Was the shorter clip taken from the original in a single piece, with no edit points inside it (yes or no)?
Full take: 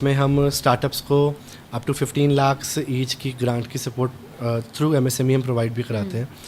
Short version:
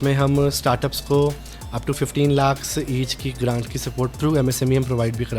no